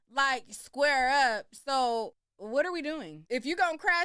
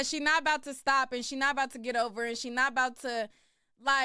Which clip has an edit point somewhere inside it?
first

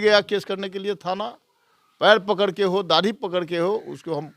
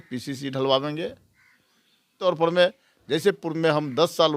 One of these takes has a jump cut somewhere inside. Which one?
second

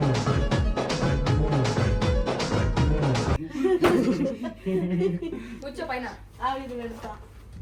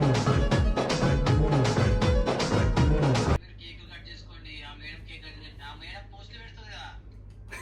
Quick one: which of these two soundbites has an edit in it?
second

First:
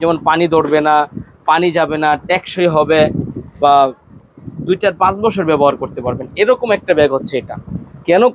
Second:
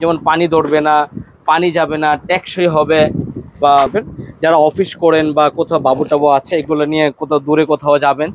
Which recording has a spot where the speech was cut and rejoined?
second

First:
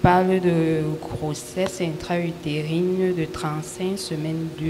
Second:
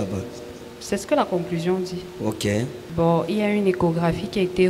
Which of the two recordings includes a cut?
second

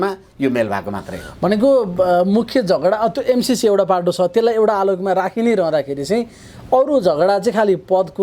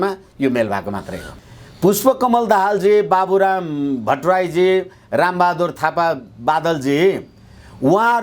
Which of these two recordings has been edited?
second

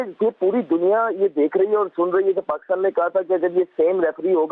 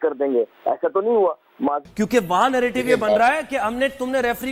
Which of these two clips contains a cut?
second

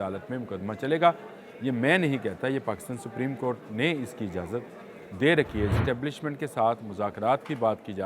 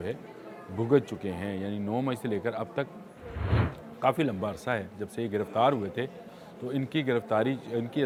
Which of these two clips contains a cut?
first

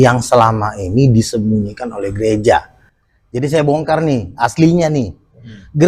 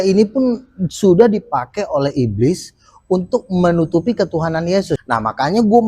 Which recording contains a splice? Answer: second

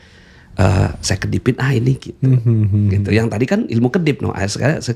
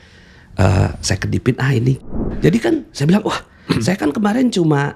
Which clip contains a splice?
second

